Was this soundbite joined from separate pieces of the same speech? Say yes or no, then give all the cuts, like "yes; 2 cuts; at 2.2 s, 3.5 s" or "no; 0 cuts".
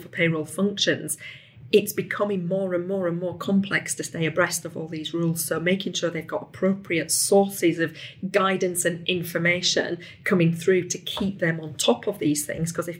no; 0 cuts